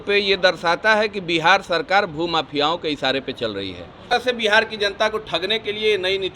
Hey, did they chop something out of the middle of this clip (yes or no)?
yes